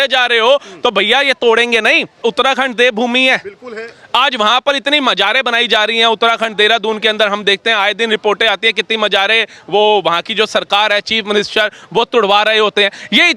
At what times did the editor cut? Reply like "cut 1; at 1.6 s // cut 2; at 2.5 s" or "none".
cut 1; at 2.2 s